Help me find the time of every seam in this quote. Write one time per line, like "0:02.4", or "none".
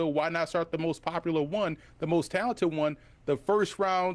none